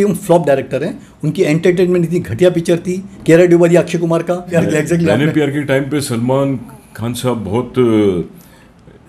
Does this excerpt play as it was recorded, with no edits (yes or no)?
no